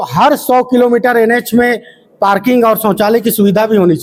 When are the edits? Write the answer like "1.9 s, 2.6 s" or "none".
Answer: none

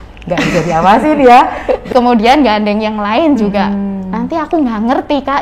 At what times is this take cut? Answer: 1.9 s

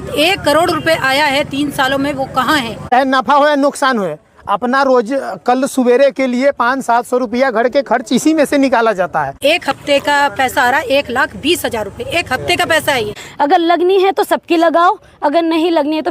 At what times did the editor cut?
2.9 s, 9.4 s, 13.2 s

